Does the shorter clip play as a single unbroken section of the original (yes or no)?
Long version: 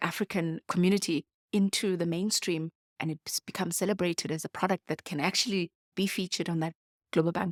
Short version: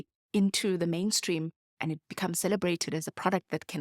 no